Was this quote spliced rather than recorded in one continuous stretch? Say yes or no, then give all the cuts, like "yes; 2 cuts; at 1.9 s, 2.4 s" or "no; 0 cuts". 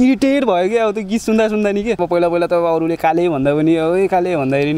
yes; 1 cut; at 2.0 s